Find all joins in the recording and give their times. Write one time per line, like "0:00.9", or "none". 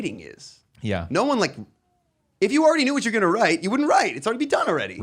none